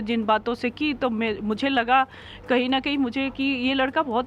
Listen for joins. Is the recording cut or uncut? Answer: uncut